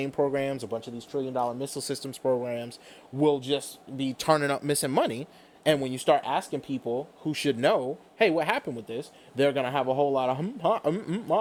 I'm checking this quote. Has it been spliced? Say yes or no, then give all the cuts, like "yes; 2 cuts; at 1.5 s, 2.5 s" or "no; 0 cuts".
no; 0 cuts